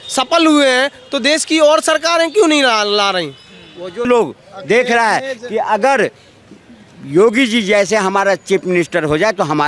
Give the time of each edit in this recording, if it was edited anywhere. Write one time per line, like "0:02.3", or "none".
0:04.1